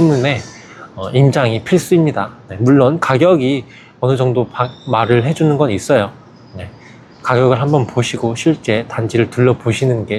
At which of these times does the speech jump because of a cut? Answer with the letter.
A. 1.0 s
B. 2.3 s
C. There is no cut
C